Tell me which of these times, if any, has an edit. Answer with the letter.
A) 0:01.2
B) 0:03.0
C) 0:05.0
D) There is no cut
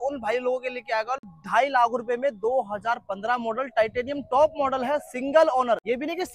D